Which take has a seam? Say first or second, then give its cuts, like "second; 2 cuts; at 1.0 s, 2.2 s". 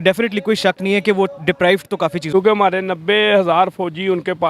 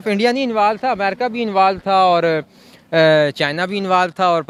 first; 1 cut; at 2.2 s